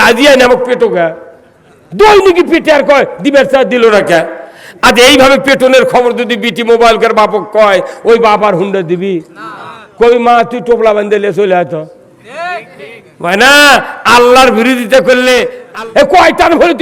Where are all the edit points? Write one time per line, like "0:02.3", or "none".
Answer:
0:15.6